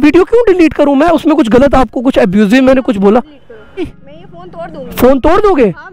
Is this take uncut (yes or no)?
no